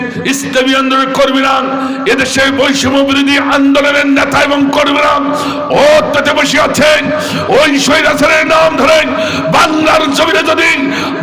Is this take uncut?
yes; 0 cuts

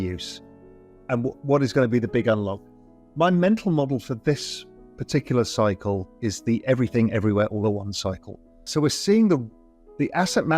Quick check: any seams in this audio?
yes; 1 cut; at 8.6 s

